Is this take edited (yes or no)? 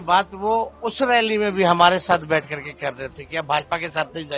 no